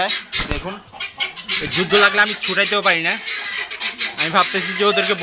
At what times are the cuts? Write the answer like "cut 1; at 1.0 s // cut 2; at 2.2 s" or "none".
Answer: none